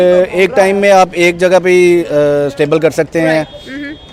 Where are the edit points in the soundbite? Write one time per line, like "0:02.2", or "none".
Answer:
none